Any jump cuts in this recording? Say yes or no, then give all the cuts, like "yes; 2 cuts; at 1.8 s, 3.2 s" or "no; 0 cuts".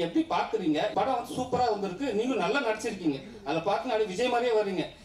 yes; 1 cut; at 0.9 s